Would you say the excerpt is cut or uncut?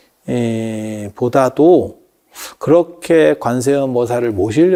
uncut